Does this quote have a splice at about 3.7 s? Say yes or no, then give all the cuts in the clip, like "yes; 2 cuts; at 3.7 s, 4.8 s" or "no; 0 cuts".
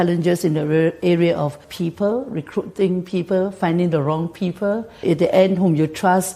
no; 2 cuts; at 1.7 s, 4.9 s